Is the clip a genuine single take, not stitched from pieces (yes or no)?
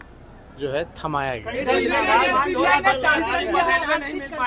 yes